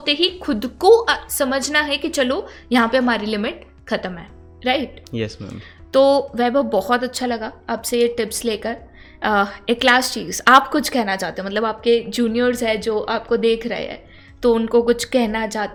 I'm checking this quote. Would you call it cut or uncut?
uncut